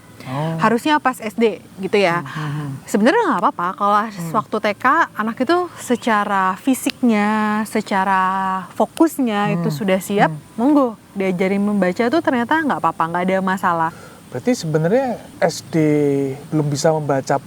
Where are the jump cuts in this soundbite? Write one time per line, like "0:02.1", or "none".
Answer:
0:14.0
0:15.2
0:16.4